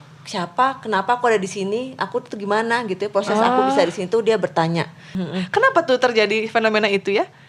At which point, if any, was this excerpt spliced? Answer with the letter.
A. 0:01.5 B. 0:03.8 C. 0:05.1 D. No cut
C